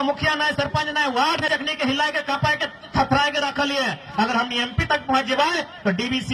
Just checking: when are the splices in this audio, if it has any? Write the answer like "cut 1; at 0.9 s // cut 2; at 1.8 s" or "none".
cut 1; at 1.5 s